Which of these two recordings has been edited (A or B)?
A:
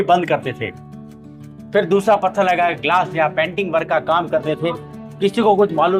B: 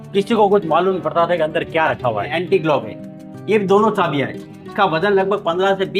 B